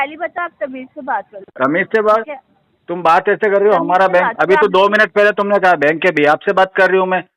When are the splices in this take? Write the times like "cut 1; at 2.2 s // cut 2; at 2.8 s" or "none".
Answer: none